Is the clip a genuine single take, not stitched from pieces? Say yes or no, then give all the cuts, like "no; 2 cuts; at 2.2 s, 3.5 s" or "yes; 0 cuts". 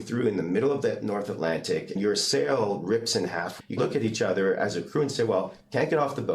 no; 2 cuts; at 2.0 s, 3.7 s